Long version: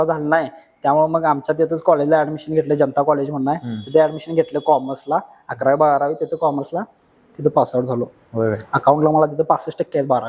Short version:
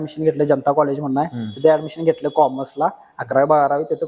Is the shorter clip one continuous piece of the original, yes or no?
yes